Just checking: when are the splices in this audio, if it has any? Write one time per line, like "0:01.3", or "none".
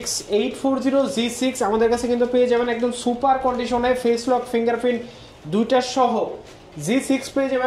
none

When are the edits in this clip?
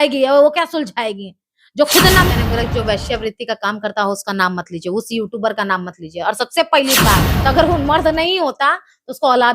0:02.3
0:07.4

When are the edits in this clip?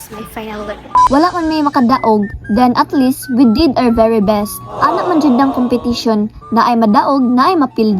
0:00.9

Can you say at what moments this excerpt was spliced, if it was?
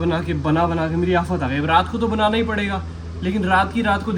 none

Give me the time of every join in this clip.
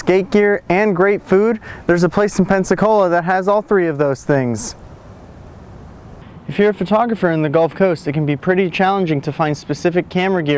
0:06.2

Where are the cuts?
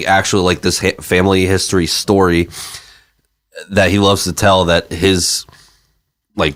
none

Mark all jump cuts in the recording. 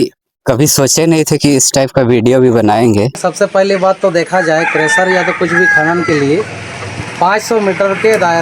0:03.2

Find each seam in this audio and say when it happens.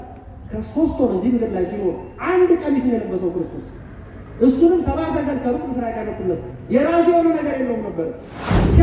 none

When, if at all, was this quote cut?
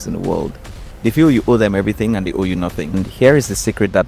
0:02.9

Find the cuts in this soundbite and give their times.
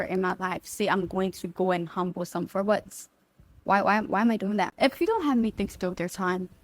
0:04.7

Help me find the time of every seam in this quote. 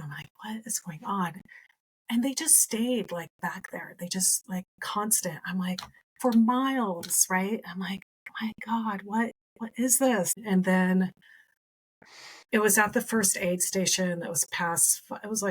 0:10.4

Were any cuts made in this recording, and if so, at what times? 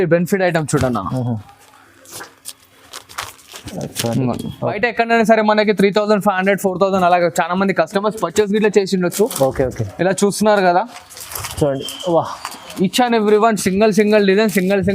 0:04.7

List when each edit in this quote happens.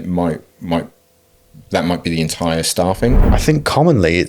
0:03.2

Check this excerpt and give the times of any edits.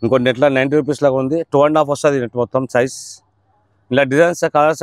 none

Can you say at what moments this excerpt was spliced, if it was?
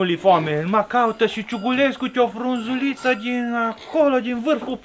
none

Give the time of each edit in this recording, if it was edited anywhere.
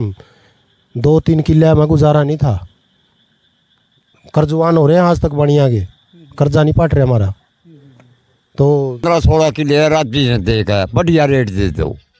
0:09.0

